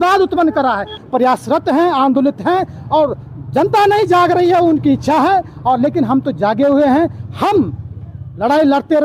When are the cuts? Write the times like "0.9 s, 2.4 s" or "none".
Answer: 1.0 s